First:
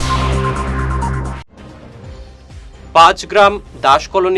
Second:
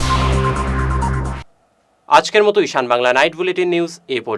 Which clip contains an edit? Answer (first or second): first